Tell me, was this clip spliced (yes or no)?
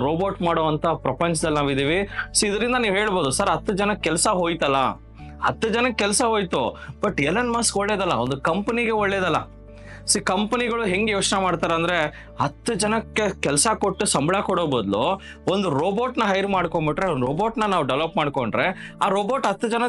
no